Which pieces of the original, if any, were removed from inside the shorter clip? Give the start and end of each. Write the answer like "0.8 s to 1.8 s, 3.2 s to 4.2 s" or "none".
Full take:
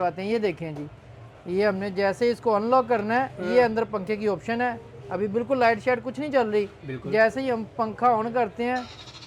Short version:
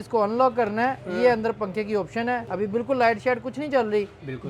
4.8 s to 5.1 s